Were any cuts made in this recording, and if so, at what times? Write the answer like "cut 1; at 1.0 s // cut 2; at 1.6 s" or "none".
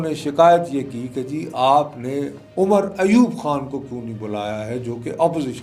none